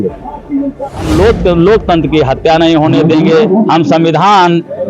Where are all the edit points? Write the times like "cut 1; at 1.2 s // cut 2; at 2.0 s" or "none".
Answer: cut 1; at 1.1 s